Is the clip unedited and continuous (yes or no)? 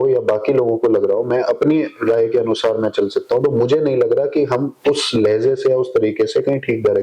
yes